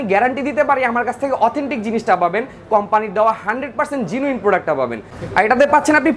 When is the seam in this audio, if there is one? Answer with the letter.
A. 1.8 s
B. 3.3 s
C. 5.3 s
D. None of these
C